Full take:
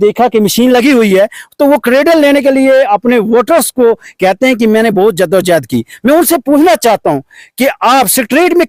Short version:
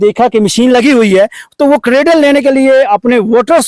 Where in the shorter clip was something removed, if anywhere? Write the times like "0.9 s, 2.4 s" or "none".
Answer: none